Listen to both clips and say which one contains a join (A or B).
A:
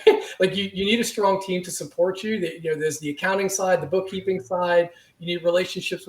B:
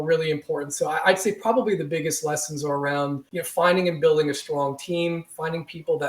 B